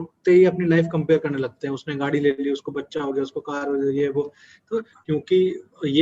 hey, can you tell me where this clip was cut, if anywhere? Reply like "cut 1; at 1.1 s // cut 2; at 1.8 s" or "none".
cut 1; at 4.9 s